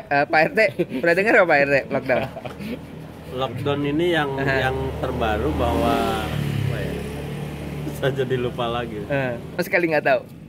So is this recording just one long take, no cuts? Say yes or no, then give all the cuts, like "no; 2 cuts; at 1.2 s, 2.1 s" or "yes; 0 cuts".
no; 1 cut; at 9.6 s